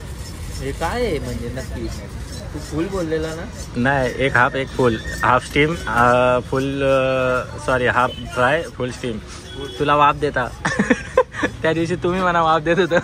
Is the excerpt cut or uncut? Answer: uncut